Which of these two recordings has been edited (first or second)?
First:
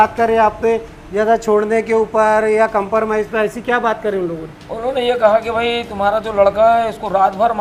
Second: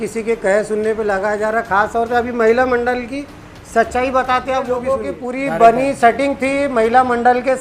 second